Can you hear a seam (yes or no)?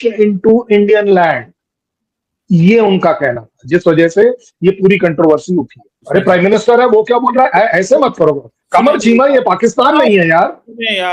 yes